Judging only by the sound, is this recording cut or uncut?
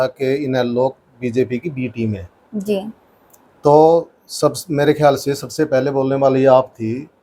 uncut